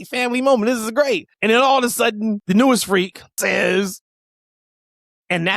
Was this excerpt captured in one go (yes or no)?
no